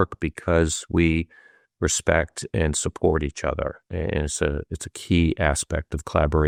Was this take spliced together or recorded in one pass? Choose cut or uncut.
uncut